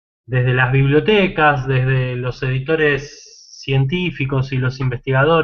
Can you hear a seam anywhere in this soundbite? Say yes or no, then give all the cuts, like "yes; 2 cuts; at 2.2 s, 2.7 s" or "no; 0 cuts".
no; 0 cuts